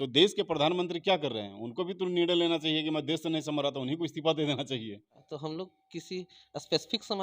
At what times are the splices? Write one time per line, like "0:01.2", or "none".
0:05.2